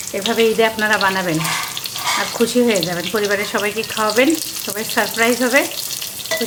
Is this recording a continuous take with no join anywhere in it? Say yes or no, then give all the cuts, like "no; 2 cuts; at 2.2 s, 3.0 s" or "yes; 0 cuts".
yes; 0 cuts